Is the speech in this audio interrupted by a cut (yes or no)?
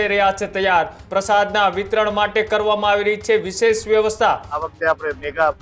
yes